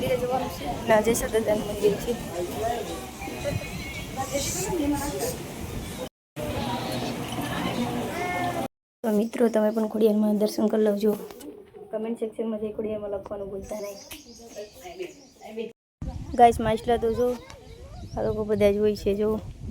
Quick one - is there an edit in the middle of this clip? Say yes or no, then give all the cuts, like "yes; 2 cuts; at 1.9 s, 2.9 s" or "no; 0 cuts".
yes; 3 cuts; at 6.2 s, 8.8 s, 15.8 s